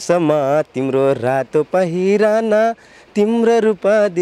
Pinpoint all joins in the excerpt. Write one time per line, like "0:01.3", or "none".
none